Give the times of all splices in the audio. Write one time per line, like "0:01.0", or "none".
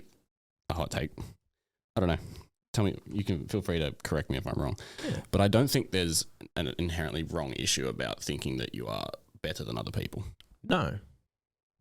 none